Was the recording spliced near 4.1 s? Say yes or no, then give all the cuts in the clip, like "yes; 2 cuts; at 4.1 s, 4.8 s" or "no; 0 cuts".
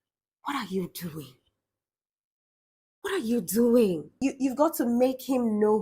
yes; 1 cut; at 4.1 s